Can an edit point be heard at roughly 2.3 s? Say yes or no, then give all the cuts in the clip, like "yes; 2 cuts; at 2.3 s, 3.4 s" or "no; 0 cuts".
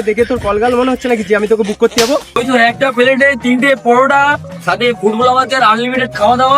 yes; 1 cut; at 2.3 s